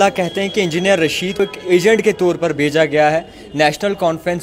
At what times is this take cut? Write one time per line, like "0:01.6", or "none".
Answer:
0:01.4